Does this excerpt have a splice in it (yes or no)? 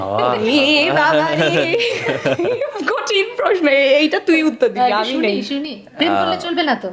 no